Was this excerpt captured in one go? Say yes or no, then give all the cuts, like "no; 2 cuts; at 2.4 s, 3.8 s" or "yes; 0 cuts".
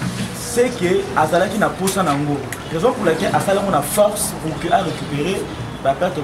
yes; 0 cuts